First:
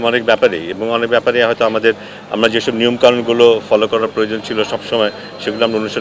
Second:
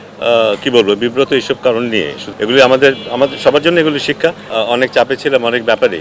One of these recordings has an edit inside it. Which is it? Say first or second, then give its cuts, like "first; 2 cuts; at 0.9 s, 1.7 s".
second; 2 cuts; at 2.2 s, 4.5 s